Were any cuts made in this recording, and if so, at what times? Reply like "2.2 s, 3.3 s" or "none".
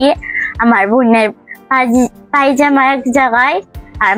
none